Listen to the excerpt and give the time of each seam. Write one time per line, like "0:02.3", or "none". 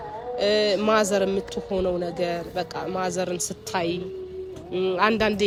none

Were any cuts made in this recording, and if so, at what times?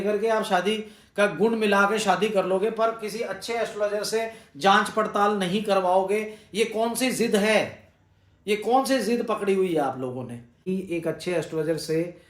0:10.6

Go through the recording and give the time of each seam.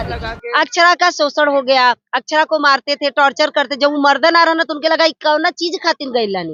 none

